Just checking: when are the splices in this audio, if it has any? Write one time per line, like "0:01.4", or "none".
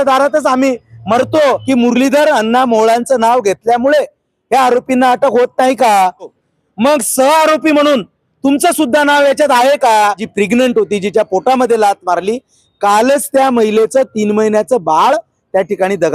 0:01.6
0:06.4
0:10.2